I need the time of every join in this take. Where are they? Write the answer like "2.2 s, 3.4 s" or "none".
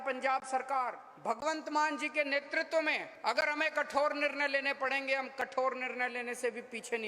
1.1 s, 3.1 s